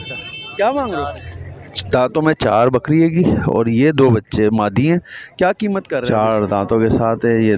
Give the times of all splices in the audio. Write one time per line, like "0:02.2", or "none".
0:01.0
0:05.9